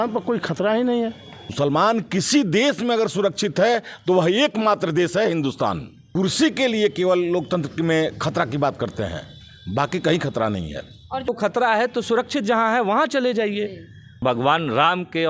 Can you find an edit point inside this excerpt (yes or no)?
yes